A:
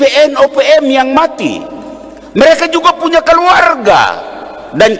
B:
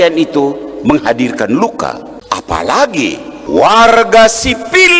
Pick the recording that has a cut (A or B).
B